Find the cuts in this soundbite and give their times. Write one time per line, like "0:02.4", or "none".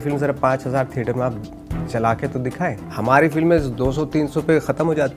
0:02.8